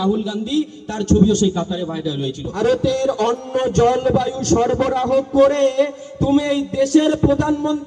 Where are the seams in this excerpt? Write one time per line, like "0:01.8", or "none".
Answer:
0:02.4